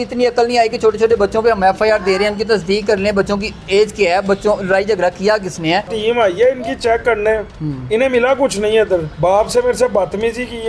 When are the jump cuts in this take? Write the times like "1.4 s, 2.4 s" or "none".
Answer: 5.9 s, 9.1 s